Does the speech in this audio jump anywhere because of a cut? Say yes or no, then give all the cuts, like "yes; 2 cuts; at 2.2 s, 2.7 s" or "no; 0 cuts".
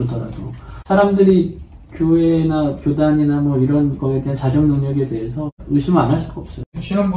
yes; 1 cut; at 5.5 s